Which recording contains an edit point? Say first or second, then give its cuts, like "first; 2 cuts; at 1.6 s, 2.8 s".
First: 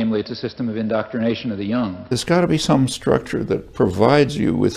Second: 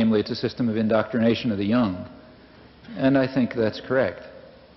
first; 1 cut; at 2.0 s